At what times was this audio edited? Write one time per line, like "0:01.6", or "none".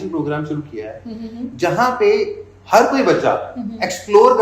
none